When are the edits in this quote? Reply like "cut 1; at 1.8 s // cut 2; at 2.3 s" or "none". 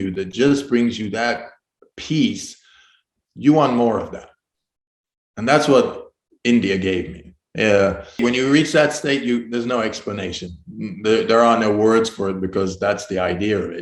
cut 1; at 8.2 s